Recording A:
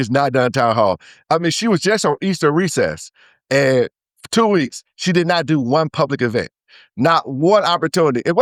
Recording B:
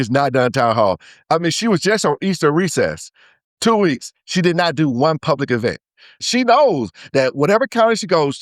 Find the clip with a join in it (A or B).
B